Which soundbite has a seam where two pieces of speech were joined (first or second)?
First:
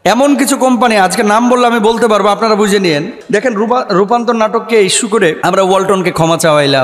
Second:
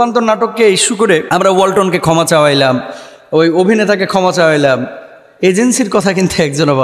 first